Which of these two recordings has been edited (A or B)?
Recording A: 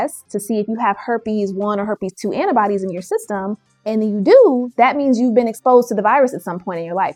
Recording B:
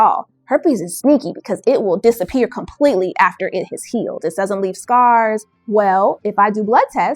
B